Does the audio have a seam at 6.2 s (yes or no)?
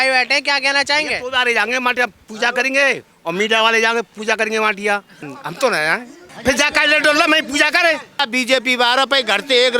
yes